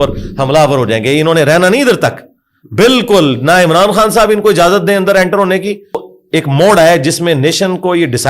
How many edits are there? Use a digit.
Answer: 1